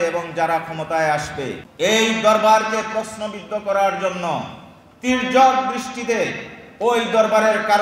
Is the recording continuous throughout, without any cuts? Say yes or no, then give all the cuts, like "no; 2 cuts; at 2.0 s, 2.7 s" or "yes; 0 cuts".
no; 1 cut; at 1.6 s